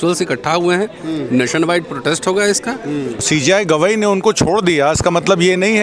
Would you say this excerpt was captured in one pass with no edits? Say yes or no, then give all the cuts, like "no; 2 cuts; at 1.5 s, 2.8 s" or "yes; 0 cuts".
no; 1 cut; at 3.1 s